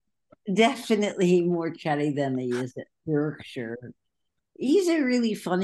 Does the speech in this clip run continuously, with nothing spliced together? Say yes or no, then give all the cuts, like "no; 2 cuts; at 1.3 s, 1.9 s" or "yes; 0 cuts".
yes; 0 cuts